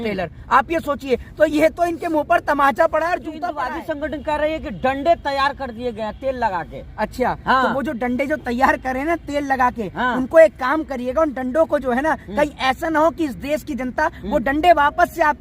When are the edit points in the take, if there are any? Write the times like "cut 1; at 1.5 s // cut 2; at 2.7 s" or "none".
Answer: cut 1; at 3.5 s